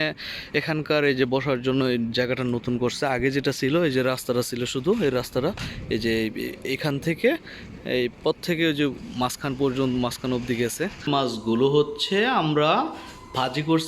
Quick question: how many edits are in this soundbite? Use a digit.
1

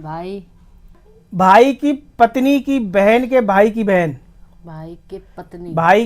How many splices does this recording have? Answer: 1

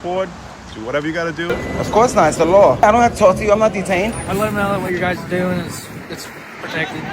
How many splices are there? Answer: 3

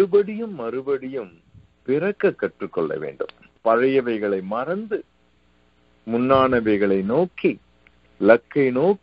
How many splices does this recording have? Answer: 1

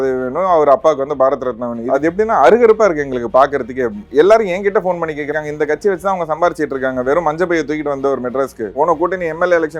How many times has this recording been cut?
3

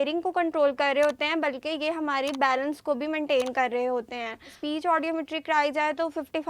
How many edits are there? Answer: 1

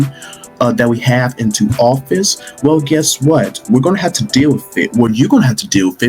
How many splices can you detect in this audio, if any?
0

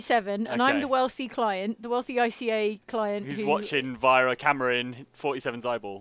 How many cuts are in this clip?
0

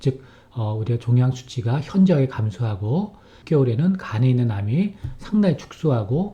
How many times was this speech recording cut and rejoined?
1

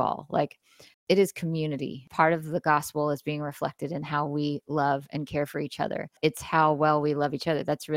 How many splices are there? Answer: 2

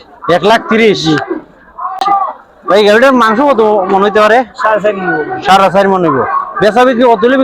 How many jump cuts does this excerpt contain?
1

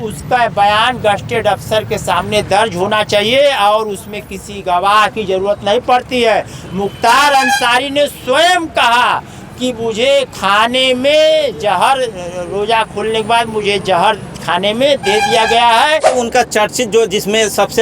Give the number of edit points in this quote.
1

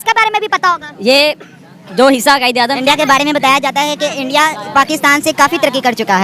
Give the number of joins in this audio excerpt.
1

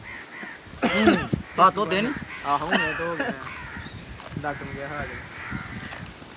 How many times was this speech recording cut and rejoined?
0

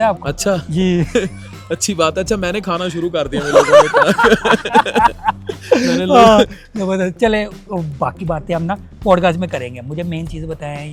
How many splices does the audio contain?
0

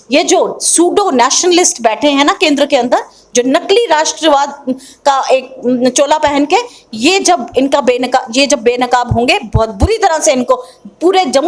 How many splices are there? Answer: 0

